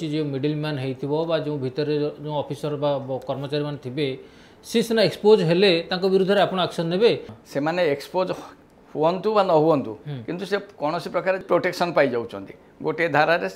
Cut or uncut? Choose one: cut